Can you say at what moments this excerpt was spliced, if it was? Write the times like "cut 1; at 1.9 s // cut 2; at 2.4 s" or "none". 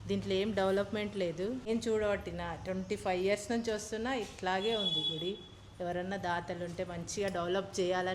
cut 1; at 1.7 s